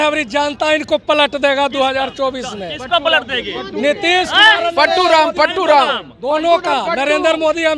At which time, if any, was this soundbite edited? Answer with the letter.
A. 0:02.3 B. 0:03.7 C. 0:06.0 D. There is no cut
D